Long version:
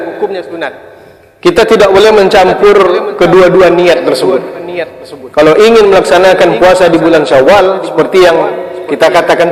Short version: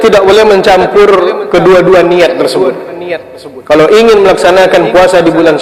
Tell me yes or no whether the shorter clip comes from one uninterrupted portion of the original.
yes